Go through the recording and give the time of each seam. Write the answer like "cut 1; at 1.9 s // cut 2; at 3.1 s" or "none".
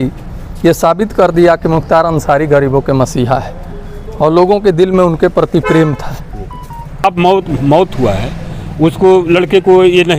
cut 1; at 7.0 s